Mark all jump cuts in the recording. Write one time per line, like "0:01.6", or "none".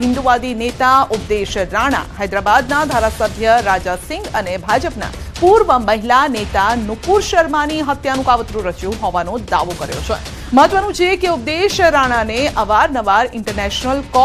none